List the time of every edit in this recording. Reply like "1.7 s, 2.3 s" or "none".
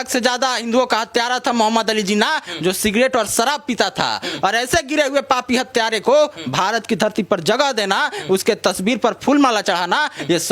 none

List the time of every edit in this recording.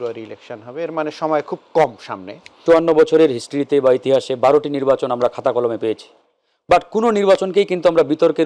2.6 s

